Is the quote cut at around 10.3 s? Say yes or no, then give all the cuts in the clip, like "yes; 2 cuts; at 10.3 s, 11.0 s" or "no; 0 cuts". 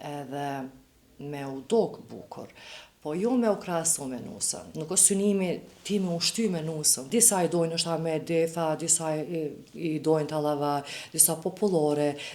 no; 2 cuts; at 4.7 s, 6.9 s